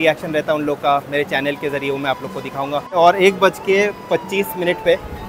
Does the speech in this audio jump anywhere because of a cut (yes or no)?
yes